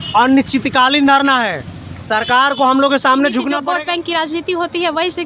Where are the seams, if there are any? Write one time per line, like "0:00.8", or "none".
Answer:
0:03.5